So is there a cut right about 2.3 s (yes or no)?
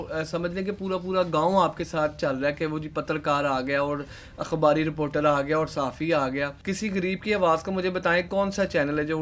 no